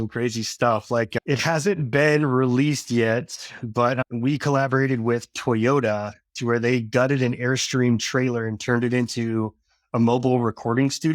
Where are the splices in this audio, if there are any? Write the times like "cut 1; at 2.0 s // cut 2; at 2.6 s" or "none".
cut 1; at 1.2 s